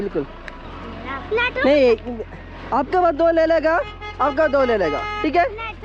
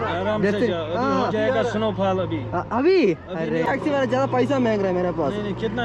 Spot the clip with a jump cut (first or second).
second